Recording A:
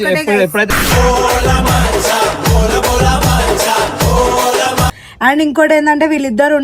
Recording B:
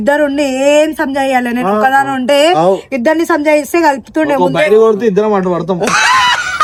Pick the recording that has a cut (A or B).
A